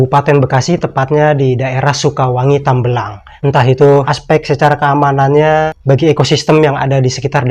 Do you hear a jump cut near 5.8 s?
yes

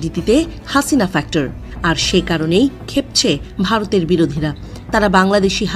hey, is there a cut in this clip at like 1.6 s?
yes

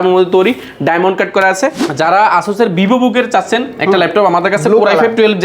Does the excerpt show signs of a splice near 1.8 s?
yes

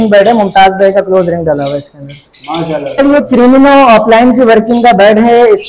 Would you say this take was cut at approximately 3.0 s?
yes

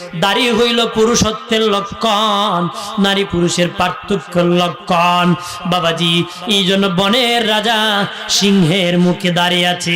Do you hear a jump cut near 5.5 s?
no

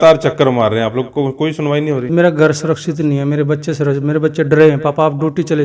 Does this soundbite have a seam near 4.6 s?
no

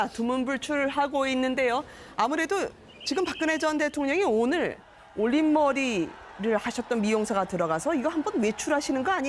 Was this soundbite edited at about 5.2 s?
yes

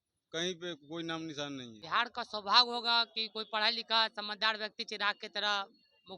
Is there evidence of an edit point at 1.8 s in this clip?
yes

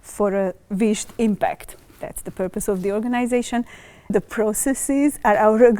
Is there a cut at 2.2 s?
no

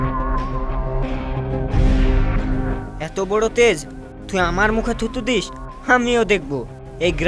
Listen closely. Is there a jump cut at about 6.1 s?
no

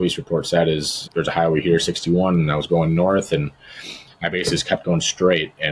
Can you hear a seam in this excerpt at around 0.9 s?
yes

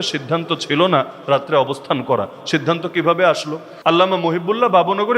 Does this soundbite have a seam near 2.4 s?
no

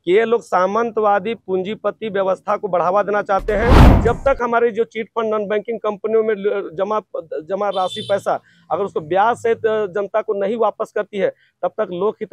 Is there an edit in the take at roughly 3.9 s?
yes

